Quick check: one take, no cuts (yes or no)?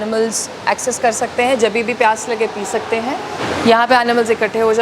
no